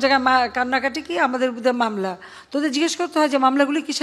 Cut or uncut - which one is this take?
uncut